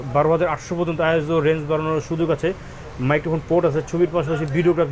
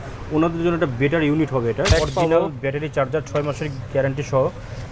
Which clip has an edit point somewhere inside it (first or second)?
second